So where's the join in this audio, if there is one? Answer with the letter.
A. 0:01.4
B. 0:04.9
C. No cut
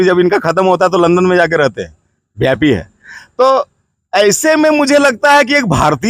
C